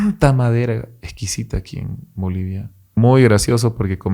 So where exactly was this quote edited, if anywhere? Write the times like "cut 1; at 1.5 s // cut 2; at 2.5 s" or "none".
cut 1; at 3.0 s